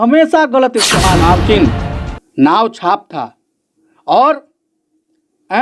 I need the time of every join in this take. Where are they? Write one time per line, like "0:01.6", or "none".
0:01.2